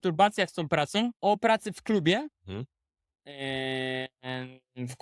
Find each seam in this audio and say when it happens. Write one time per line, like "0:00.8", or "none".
0:01.2

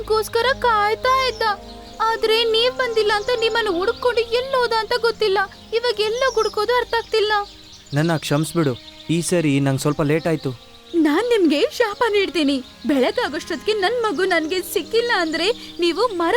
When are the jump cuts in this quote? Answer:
none

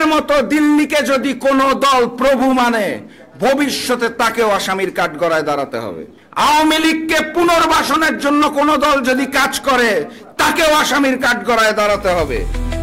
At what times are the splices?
none

